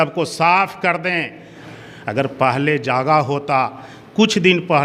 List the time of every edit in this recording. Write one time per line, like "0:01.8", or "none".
0:01.6